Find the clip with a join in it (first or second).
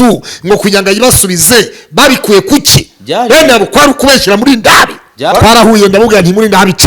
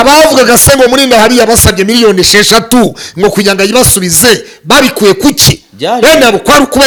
first